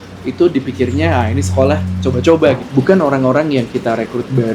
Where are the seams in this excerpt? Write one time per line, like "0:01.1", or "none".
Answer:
0:02.6